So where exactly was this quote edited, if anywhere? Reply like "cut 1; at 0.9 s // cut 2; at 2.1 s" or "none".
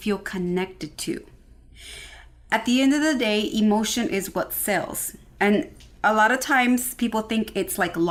none